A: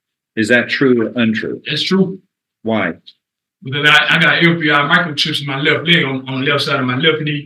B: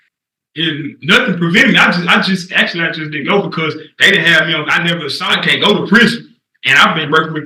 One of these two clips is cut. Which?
B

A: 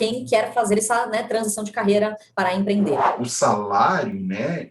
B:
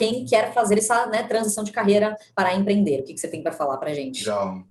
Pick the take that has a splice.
A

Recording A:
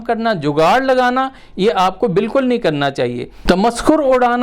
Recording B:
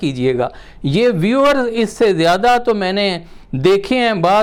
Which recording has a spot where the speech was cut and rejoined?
A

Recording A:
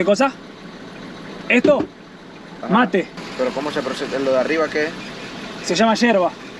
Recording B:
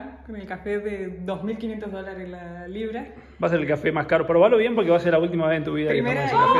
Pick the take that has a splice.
A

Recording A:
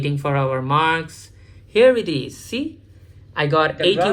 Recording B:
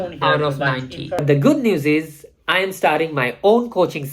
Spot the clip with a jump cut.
B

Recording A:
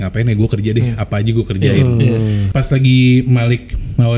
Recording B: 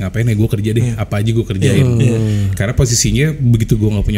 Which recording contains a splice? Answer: A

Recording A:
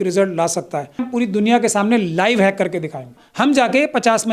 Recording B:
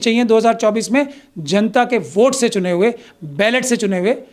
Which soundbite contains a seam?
A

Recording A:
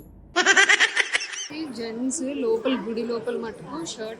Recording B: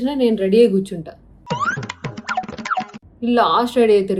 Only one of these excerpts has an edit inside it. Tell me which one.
A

